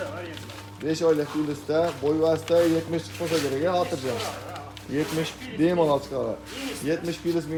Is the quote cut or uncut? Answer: uncut